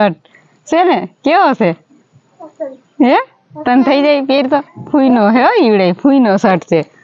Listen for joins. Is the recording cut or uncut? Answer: uncut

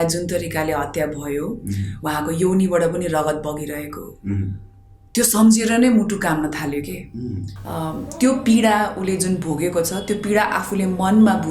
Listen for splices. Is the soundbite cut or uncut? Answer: cut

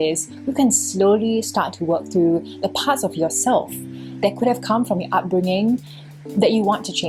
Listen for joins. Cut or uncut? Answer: uncut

